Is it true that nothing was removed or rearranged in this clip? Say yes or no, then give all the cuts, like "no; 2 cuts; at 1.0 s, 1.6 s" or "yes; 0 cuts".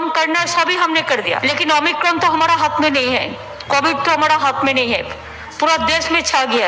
no; 1 cut; at 1.4 s